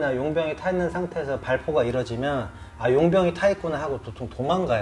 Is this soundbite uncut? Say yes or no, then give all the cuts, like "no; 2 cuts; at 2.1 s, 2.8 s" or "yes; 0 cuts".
yes; 0 cuts